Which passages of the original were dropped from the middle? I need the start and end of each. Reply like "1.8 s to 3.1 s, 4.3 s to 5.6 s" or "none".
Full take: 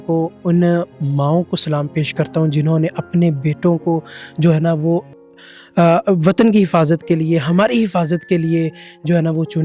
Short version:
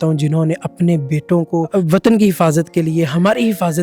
4.0 s to 6.0 s